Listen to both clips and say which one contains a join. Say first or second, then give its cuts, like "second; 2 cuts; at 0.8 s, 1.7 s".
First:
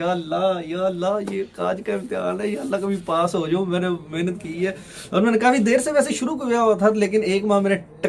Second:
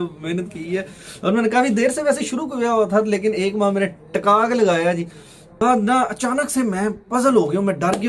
second; 1 cut; at 5.6 s